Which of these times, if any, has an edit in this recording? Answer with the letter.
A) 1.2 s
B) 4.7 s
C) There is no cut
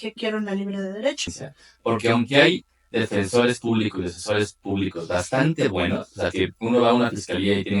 A